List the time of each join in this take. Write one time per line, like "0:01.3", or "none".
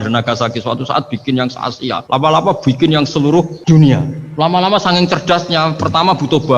0:02.0
0:03.6
0:04.2